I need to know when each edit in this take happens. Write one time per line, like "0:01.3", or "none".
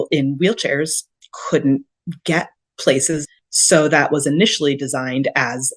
0:03.2

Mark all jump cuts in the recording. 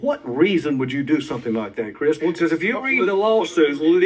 none

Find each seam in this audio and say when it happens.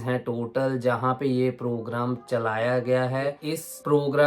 0:03.4

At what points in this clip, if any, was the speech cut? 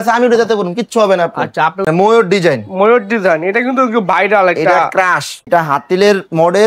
0:01.9
0:05.4

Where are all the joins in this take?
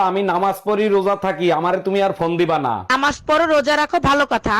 none

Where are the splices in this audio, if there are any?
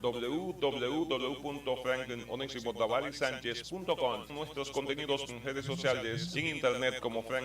0:04.3
0:05.3
0:06.3

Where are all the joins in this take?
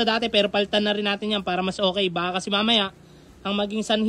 none

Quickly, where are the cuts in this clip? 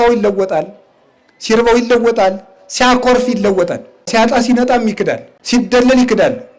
0:04.1
0:05.3

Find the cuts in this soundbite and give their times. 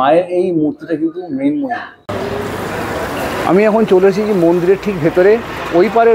0:01.9

